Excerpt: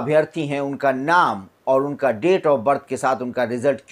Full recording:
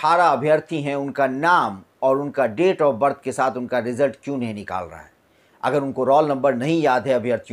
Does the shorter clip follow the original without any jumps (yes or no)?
yes